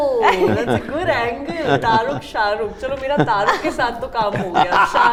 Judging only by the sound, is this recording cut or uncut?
uncut